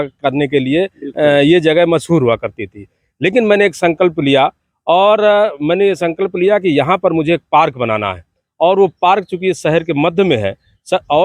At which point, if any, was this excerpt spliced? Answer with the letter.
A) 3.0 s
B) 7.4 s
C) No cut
C